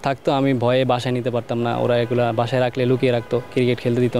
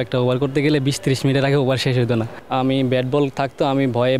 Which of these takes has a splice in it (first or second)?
second